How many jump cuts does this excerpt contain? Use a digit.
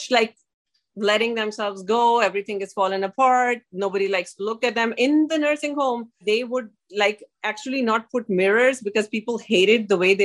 1